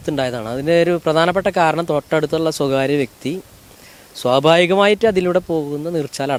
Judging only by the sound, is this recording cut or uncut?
uncut